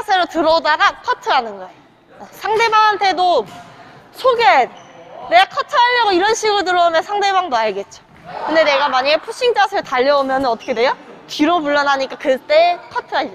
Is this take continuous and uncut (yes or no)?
yes